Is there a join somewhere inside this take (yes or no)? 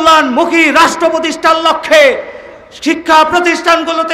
no